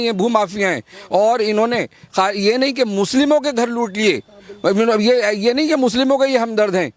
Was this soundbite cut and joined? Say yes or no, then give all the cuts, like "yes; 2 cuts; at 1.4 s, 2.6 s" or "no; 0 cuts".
no; 0 cuts